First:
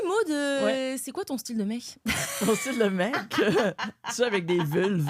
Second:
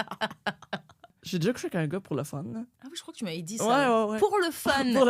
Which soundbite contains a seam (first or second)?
second